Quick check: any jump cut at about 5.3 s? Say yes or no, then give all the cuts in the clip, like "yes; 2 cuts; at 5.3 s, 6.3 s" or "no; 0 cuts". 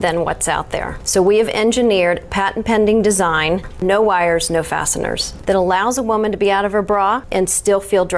yes; 4 cuts; at 1.0 s, 3.6 s, 5.3 s, 7.2 s